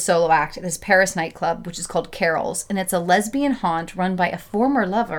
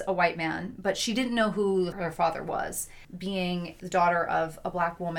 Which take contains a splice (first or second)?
second